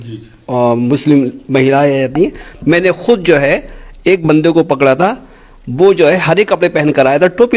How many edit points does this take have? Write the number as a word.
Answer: zero